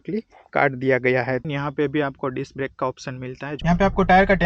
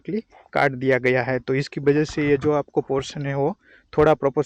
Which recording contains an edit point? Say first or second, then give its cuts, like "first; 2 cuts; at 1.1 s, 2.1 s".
first; 2 cuts; at 1.4 s, 3.6 s